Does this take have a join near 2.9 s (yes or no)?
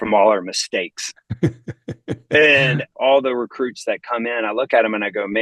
yes